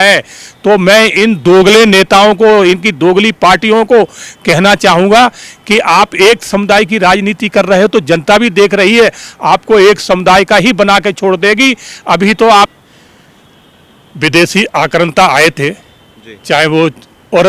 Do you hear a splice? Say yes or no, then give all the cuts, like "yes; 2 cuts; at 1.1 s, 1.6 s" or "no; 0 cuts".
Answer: yes; 1 cut; at 12.7 s